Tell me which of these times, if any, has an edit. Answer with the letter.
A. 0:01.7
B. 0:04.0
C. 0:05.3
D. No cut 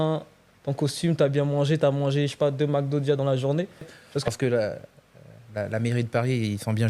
B